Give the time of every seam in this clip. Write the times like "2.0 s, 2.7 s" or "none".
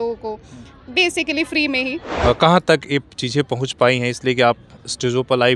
2.0 s